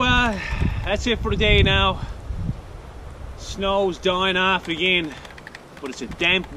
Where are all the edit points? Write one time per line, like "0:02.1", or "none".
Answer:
none